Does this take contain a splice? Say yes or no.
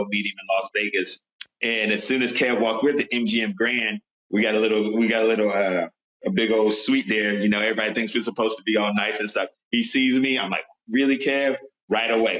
yes